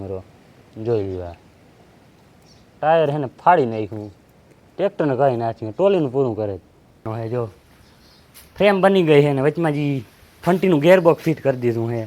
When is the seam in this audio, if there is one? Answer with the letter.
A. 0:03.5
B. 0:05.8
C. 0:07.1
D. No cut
C